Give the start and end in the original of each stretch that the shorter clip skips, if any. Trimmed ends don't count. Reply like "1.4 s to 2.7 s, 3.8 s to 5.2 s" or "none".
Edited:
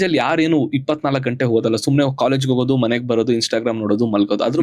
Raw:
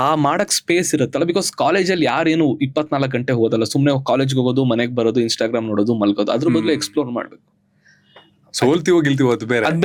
none